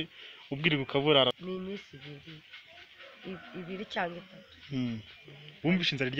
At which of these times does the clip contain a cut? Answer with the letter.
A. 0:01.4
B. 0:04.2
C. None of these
A